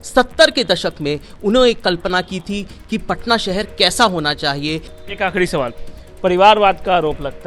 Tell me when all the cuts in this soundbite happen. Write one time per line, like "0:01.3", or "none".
0:04.9